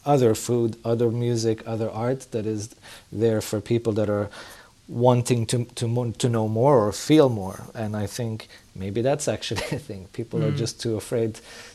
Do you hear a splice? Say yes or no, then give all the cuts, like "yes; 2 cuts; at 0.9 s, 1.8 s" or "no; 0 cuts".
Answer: no; 0 cuts